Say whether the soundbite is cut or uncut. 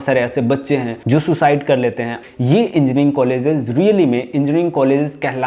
cut